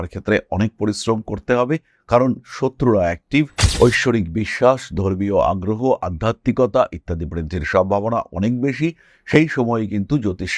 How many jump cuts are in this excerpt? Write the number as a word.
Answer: one